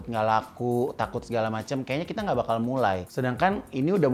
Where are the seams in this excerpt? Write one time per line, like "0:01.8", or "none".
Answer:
0:03.1

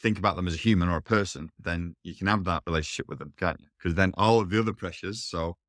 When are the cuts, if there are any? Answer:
0:03.7

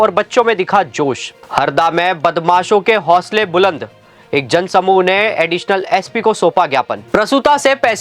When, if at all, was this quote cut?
0:01.3
0:07.0

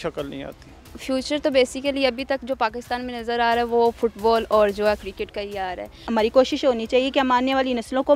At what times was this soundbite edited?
0:00.9
0:06.0

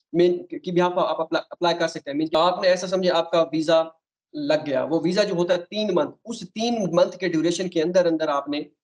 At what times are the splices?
0:02.3

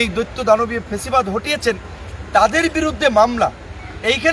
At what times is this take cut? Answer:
none

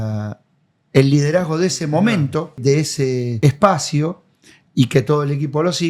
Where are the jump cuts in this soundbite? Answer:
0:02.9

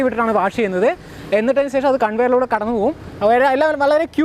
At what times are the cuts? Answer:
none

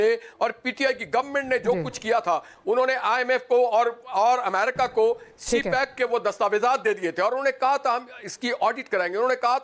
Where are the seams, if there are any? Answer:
none

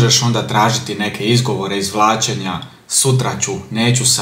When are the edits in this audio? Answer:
none

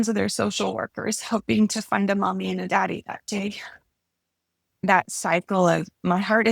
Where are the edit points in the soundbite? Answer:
0:04.8

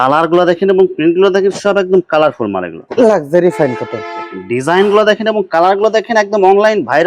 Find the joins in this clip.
0:02.8

